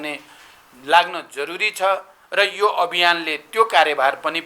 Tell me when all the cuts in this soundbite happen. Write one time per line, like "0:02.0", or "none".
none

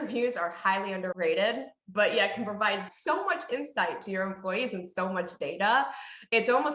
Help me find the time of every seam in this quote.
0:01.1
0:02.9

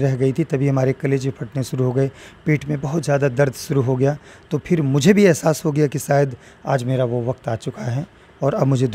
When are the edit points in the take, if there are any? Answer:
none

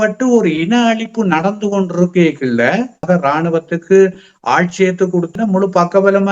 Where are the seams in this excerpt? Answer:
0:03.0
0:05.3

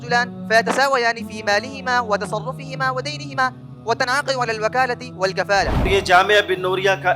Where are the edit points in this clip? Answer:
none

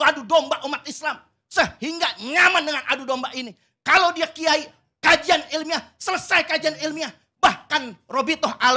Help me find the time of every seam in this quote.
none

